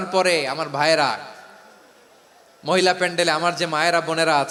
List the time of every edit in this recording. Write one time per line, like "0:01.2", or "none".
none